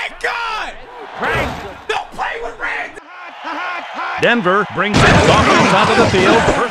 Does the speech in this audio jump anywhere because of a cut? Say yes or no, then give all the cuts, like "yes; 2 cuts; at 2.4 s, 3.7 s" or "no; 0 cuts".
yes; 1 cut; at 3.0 s